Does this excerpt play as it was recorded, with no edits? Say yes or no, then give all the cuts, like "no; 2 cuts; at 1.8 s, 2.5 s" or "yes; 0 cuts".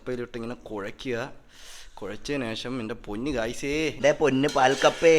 no; 1 cut; at 3.9 s